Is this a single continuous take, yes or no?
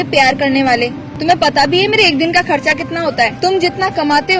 no